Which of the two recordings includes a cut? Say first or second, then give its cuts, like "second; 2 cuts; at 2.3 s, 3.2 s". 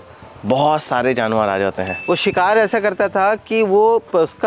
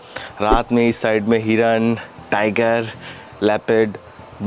first; 1 cut; at 1.9 s